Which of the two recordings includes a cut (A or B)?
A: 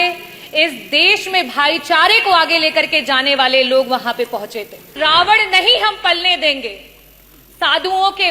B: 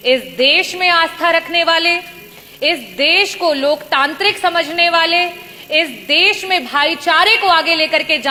A